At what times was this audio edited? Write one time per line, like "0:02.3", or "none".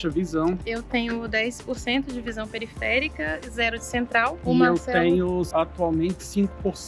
none